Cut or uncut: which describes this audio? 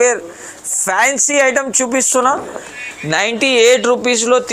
cut